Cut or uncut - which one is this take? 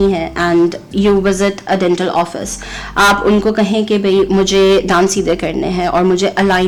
uncut